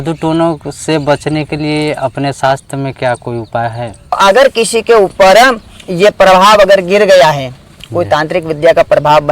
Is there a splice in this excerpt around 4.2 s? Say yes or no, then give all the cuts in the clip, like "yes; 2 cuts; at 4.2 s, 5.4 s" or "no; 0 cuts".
yes; 1 cut; at 4.2 s